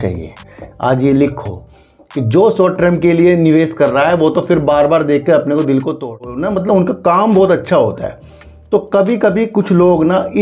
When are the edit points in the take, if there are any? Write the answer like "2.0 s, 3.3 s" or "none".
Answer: 6.1 s